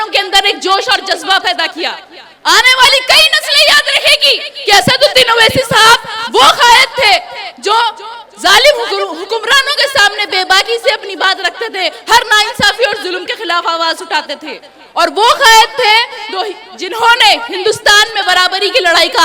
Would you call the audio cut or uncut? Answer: uncut